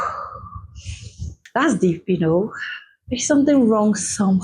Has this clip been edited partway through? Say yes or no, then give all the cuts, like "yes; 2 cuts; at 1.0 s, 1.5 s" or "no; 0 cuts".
yes; 1 cut; at 1.4 s